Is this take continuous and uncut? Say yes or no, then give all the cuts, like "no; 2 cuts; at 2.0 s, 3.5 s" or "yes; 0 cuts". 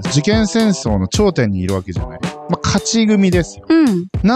yes; 0 cuts